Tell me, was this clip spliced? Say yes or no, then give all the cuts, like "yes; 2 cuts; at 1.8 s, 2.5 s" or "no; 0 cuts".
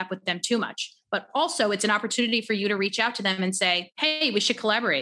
yes; 1 cut; at 3.9 s